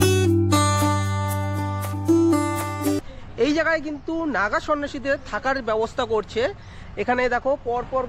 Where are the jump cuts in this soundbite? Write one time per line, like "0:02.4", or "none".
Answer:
0:03.0